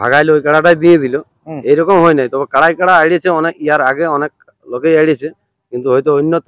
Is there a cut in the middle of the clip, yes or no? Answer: no